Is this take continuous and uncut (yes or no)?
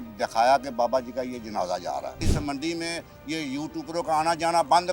no